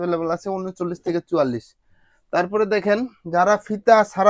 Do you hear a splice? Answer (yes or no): no